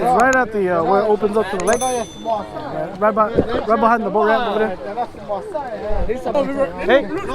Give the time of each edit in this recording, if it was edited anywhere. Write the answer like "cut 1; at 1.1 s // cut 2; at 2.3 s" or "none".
cut 1; at 6.3 s